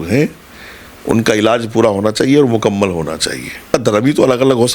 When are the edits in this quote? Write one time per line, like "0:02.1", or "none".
0:03.7